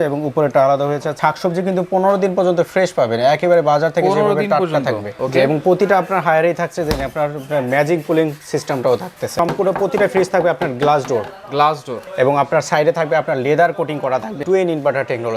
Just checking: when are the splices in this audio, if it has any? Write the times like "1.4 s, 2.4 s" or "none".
1.1 s, 5.1 s, 9.3 s, 12.0 s, 14.4 s